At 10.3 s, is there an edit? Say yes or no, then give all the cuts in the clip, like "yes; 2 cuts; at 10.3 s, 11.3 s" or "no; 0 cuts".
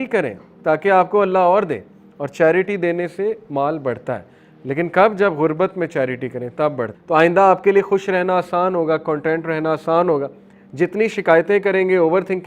no; 1 cut; at 6.9 s